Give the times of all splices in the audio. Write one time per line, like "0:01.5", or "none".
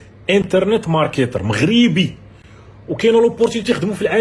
none